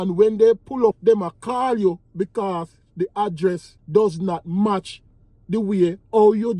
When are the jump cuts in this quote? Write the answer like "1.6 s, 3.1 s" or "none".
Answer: 1.0 s, 3.7 s